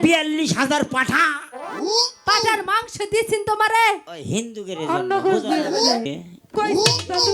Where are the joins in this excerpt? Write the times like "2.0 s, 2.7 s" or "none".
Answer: 6.1 s